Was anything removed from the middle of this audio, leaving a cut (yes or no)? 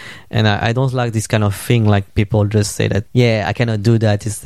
yes